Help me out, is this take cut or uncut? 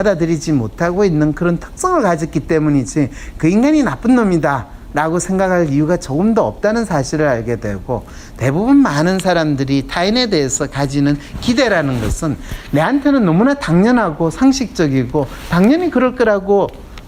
uncut